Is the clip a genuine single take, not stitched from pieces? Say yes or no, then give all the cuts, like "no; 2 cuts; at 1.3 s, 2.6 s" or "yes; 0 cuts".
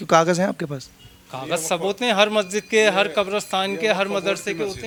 yes; 0 cuts